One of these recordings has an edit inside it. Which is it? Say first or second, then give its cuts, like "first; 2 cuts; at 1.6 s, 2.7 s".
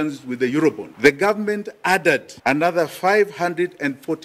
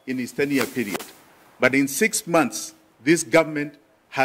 first; 2 cuts; at 0.9 s, 2.3 s